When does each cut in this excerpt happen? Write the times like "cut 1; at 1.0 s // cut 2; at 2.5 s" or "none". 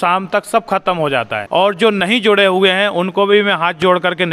cut 1; at 1.4 s